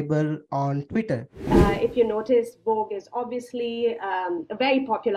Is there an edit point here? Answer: yes; 1 cut; at 1.3 s

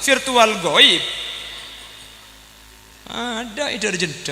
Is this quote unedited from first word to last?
no; 1 cut; at 2.9 s

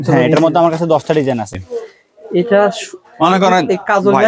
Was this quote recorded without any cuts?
no; 1 cut; at 1.5 s

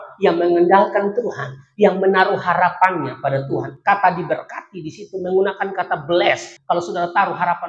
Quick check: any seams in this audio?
yes; 1 cut; at 6.5 s

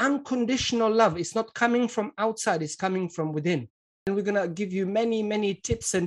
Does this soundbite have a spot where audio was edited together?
yes; 1 cut; at 3.9 s

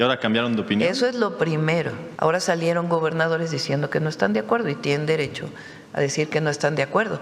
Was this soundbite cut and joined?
yes; 1 cut; at 2.0 s

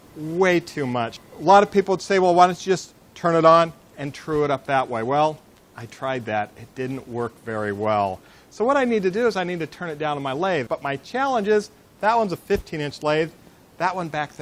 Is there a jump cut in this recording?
yes; 1 cut; at 12.4 s

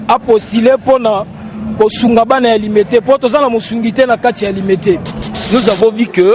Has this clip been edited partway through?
yes; 1 cut; at 5.3 s

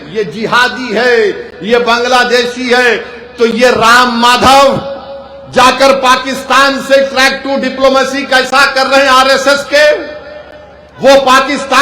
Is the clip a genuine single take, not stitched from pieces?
yes; 0 cuts

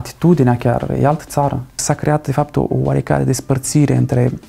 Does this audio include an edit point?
yes; 1 cut; at 1.8 s

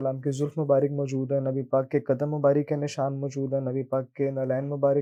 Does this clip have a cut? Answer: no; 0 cuts

